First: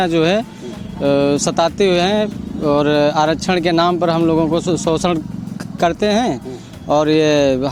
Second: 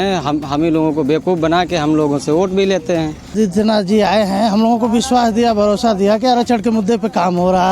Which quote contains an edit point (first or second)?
second